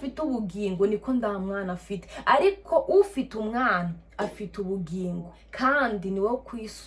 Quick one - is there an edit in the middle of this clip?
yes; 1 cut; at 5.4 s

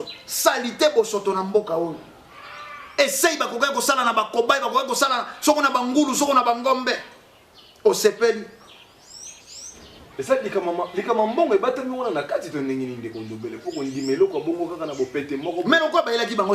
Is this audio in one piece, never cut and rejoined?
no; 1 cut; at 2.1 s

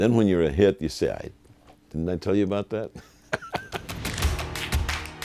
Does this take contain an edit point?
yes; 1 cut; at 3.9 s

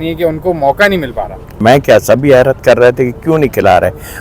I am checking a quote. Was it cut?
yes; 1 cut; at 1.6 s

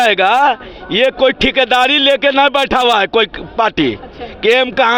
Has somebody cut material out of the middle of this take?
no; 0 cuts

